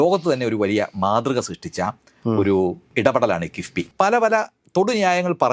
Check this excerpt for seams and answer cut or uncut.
cut